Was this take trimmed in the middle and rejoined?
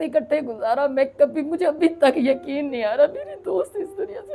no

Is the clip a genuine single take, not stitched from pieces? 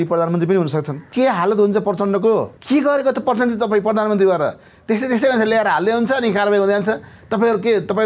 no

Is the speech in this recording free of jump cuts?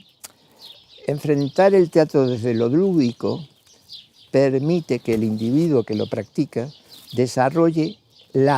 yes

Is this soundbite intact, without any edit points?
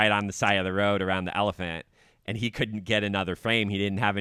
yes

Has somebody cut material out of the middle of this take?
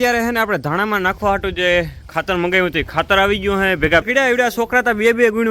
yes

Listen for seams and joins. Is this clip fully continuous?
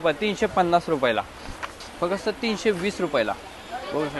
no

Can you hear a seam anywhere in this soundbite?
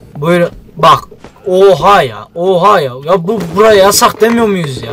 no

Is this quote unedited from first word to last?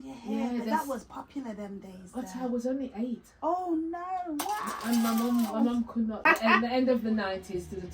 no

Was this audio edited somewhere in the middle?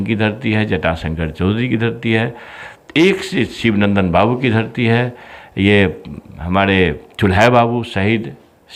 no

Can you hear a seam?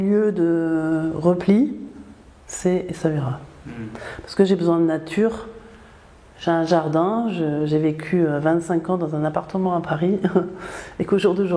no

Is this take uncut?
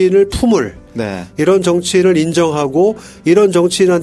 yes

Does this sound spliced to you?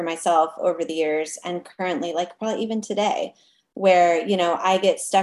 no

